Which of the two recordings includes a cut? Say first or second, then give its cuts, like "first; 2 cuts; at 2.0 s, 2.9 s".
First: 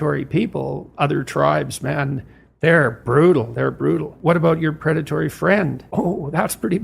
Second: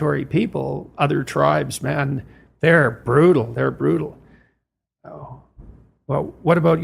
first; 2 cuts; at 4.1 s, 5.8 s